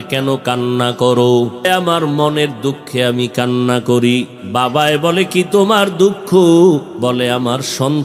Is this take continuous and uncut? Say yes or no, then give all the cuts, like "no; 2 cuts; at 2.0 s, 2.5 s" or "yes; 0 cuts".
no; 3 cuts; at 1.6 s, 4.4 s, 6.9 s